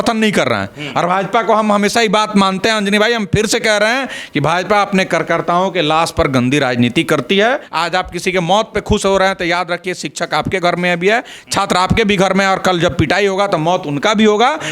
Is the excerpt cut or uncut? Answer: cut